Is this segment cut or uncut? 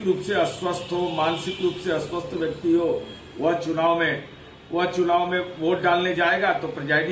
uncut